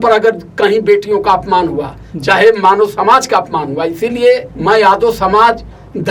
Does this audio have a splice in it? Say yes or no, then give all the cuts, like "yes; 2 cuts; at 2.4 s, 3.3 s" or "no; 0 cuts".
yes; 1 cut; at 4.5 s